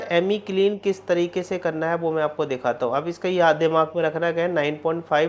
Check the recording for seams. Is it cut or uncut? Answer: uncut